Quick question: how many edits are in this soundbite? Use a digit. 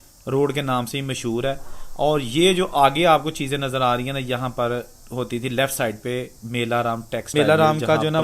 1